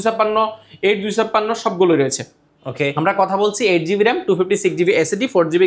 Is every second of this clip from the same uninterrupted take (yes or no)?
yes